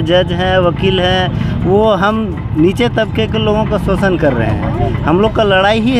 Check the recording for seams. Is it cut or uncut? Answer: uncut